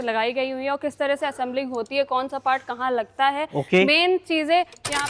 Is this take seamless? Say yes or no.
yes